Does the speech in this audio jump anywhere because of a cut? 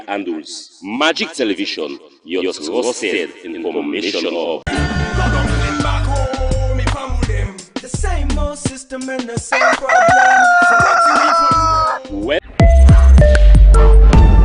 yes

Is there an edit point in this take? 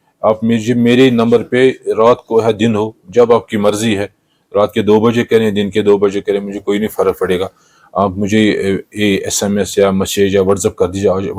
no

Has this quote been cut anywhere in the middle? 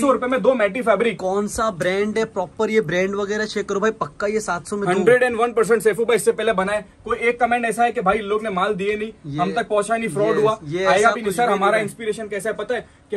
no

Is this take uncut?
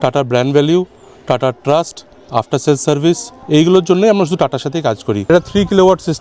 no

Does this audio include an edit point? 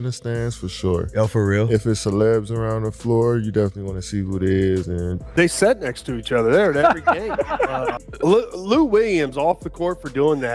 yes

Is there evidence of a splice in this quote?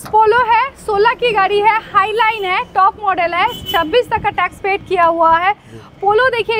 no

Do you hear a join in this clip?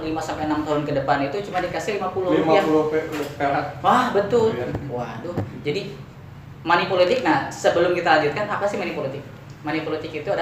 no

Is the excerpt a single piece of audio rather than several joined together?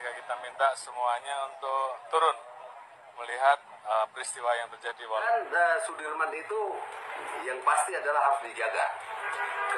no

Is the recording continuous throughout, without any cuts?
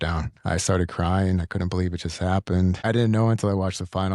no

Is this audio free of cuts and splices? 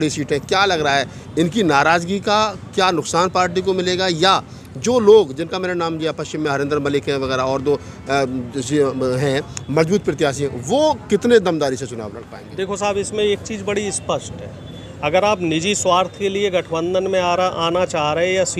yes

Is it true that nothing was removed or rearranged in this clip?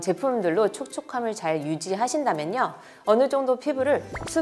yes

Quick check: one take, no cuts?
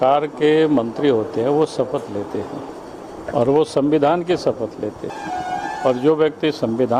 no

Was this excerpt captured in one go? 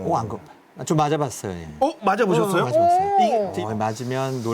no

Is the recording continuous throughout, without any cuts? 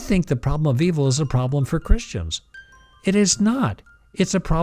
yes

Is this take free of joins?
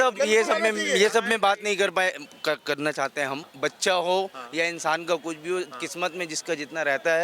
no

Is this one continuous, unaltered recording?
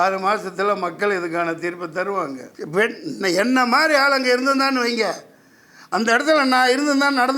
no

